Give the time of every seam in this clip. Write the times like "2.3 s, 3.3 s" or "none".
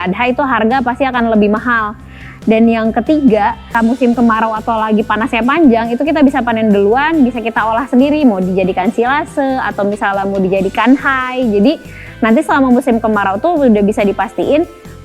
3.7 s